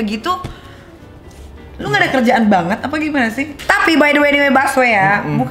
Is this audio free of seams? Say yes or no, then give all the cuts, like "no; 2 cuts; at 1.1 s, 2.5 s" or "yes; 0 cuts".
no; 1 cut; at 3.5 s